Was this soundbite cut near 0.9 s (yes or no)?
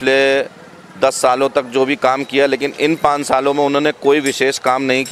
no